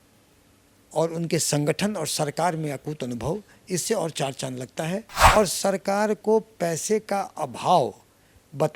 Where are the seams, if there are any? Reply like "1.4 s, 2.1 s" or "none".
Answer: 5.1 s